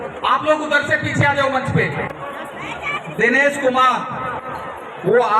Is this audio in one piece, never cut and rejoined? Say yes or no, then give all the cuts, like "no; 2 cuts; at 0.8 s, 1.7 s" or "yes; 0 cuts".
no; 1 cut; at 2.1 s